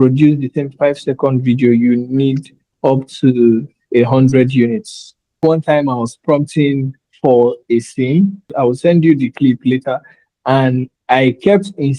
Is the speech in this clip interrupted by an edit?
yes; 2 cuts; at 5.4 s, 8.5 s

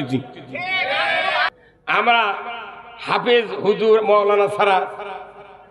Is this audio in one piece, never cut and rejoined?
no; 1 cut; at 2.0 s

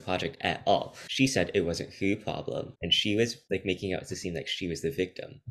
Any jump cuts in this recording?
yes; 1 cut; at 1.0 s

